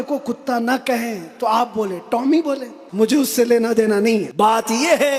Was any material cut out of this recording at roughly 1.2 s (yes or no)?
no